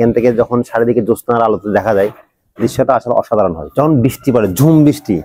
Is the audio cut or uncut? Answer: cut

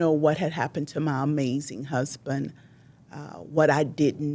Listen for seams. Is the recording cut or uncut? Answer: uncut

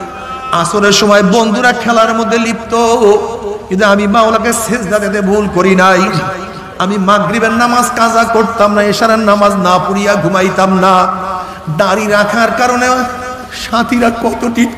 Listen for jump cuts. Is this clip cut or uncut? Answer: uncut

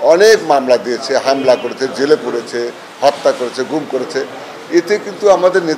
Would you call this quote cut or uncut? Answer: uncut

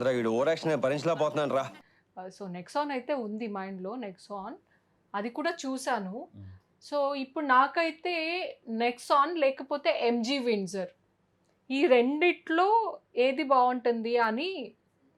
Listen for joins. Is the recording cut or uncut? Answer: uncut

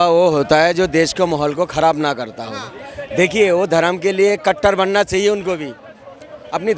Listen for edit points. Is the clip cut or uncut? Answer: uncut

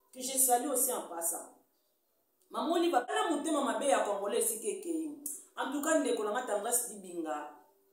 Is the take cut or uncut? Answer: cut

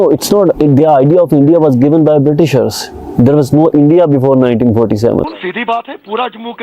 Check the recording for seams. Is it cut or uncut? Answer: cut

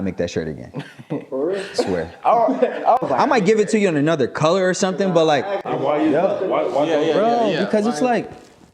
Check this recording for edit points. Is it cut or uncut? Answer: cut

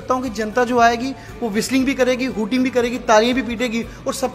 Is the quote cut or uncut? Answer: uncut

